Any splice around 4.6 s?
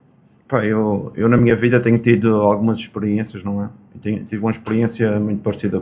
yes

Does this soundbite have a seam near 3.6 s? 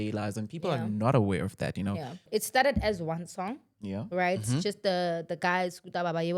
no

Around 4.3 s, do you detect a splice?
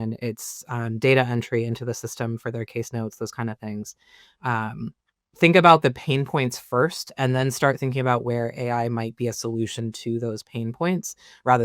no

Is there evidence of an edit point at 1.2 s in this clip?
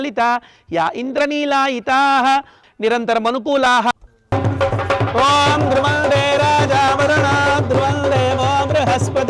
no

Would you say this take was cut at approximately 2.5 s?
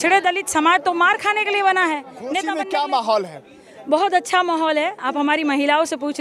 yes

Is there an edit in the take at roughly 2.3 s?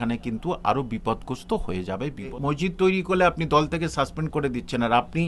yes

